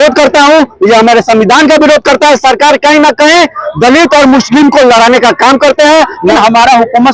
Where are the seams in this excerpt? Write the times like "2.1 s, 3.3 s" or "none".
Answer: 6.2 s